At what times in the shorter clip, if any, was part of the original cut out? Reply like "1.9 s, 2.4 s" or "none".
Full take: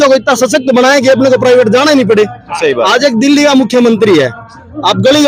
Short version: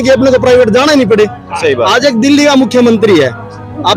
none